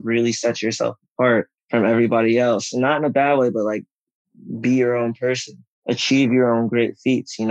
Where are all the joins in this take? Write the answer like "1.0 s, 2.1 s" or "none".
none